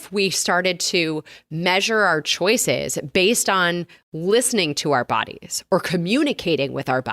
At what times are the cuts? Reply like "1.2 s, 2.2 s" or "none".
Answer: none